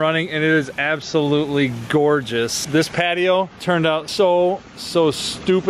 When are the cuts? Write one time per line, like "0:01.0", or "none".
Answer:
none